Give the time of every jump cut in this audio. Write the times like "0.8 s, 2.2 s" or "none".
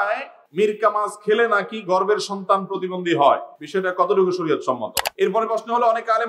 5.0 s